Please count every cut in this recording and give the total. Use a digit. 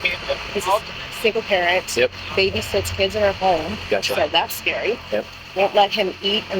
2